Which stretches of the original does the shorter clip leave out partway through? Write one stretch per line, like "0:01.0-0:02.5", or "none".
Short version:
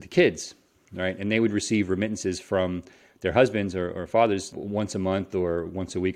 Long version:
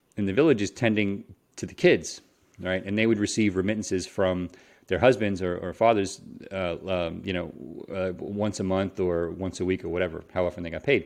0:06.2-0:08.2